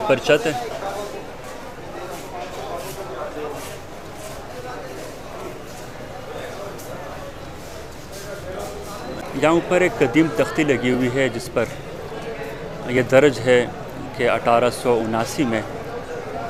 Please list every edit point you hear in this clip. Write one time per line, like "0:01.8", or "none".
none